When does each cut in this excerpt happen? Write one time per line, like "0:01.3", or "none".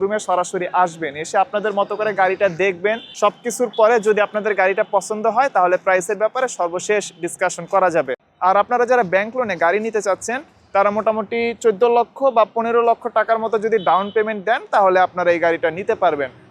0:03.1
0:08.2